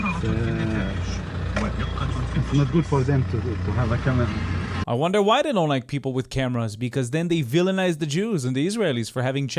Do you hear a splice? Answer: yes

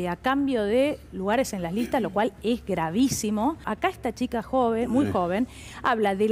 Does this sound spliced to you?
yes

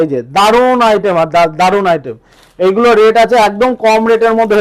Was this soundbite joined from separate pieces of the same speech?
no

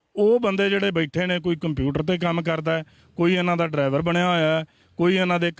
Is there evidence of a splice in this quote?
no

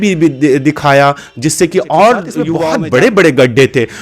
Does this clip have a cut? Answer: yes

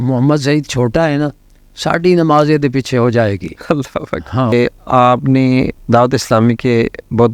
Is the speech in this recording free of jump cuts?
no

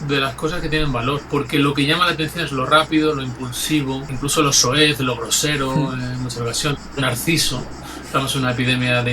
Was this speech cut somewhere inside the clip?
yes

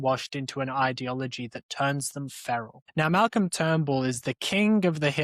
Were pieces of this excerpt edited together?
yes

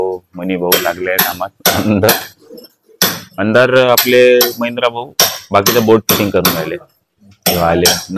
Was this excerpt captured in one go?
yes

